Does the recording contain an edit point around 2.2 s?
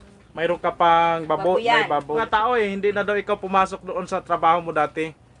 yes; 1 cut; at 2.2 s

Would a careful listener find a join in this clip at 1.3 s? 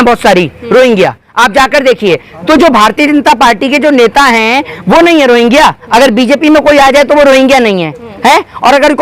no; 0 cuts

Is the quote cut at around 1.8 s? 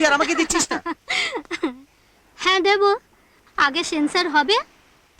no; 0 cuts

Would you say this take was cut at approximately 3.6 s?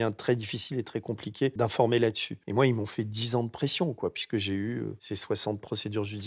no; 3 cuts; at 1.5 s, 2.3 s, 5.0 s

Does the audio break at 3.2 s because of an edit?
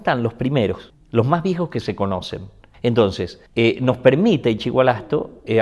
no; 1 cut; at 0.9 s

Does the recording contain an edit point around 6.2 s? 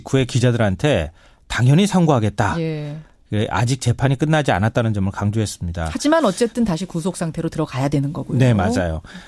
yes; 1 cut; at 6.2 s

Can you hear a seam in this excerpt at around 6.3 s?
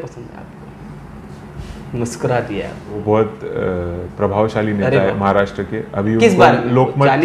no; 1 cut; at 3.0 s

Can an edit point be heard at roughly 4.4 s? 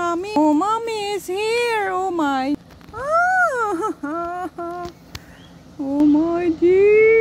no; 1 cut; at 2.6 s

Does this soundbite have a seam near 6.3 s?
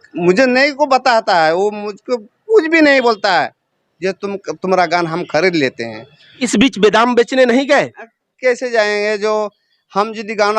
yes; 1 cut; at 6.3 s

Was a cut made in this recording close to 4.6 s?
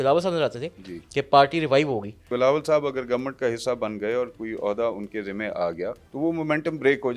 no; 2 cuts; at 2.3 s, 6.0 s

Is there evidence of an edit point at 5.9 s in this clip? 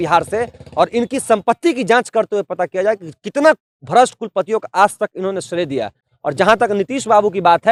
no; 0 cuts

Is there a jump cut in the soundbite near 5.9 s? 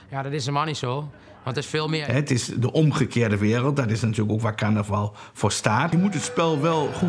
yes; 2 cuts; at 2.0 s, 5.9 s

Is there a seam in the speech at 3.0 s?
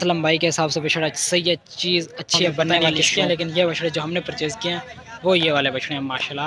yes; 1 cut; at 3.0 s

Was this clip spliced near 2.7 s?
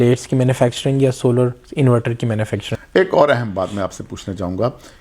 yes; 1 cut; at 2.7 s

